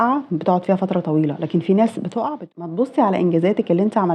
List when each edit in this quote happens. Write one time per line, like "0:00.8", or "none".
0:02.5

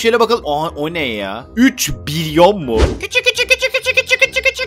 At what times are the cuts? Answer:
0:02.9

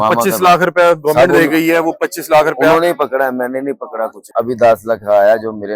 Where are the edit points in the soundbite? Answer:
0:04.2

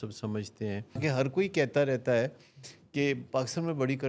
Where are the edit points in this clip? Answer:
0:01.0

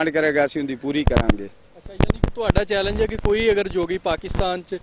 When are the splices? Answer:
none

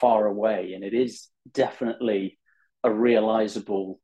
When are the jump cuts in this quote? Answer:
none

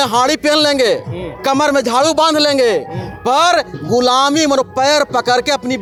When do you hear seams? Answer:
none

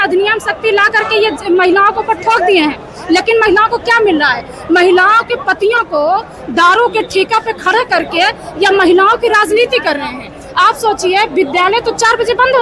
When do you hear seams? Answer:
none

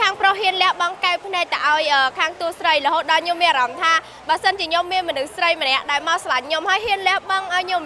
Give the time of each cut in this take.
none

